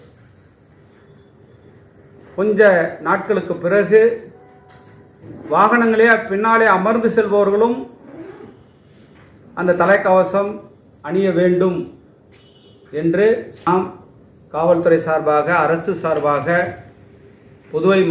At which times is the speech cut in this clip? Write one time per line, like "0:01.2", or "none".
0:13.6

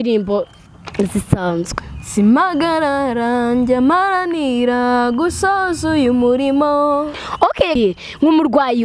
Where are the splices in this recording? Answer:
0:07.8

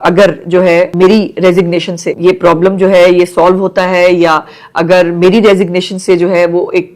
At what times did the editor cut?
0:00.9
0:02.0

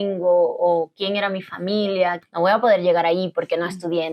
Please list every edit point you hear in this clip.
0:02.2

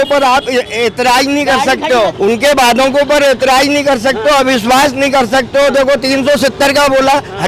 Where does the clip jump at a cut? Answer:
0:02.1

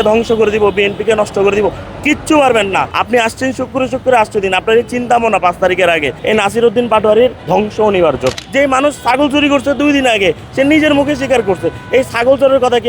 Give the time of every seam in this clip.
0:03.0
0:06.1
0:07.4
0:08.3

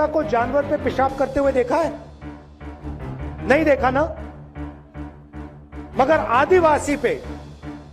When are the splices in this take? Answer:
0:01.9
0:03.5

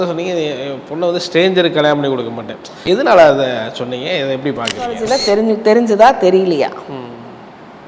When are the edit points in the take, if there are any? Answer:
0:05.1

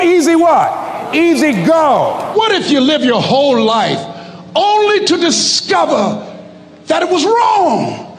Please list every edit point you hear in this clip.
0:02.3

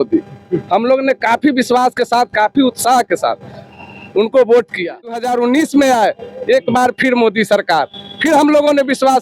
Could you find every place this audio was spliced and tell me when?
0:05.2

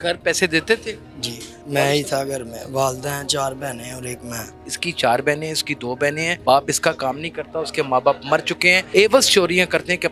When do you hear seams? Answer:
0:01.5
0:04.7
0:06.3
0:08.8

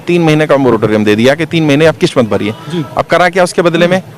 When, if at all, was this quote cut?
none

